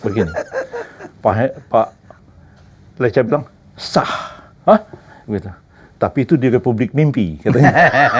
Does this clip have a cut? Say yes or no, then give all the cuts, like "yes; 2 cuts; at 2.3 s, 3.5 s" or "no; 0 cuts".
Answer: no; 0 cuts